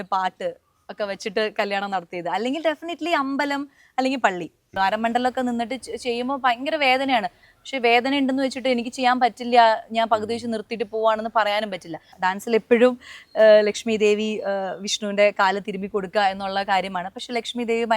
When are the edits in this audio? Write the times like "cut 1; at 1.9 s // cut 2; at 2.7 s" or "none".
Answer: cut 1; at 4.7 s // cut 2; at 12.1 s